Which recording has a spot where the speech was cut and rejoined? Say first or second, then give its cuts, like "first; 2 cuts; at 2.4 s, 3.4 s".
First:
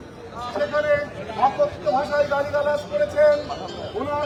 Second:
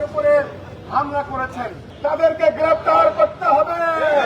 second; 1 cut; at 1.8 s